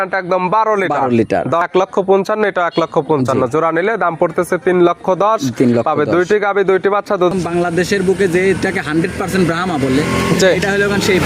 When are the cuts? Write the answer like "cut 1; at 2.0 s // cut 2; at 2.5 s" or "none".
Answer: cut 1; at 1.6 s // cut 2; at 7.3 s